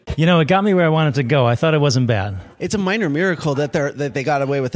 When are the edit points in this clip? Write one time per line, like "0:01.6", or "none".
none